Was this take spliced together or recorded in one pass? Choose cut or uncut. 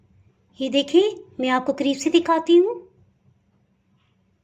uncut